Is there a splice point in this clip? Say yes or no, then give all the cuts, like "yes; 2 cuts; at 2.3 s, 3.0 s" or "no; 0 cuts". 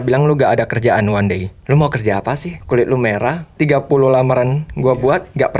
yes; 3 cuts; at 1.5 s, 2.5 s, 3.5 s